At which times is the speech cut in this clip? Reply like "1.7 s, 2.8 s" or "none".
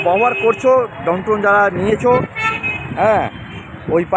none